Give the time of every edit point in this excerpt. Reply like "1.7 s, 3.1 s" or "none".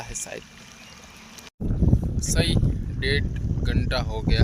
1.4 s